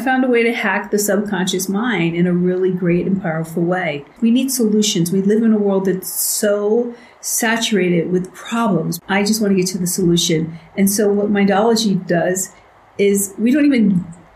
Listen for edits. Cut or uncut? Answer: cut